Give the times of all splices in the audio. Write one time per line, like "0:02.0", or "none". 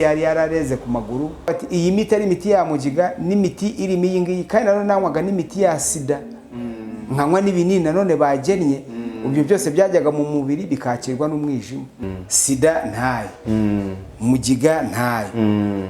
0:01.5
0:12.0